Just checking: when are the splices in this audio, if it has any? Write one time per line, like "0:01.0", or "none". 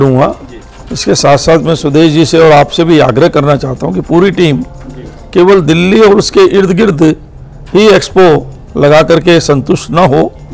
none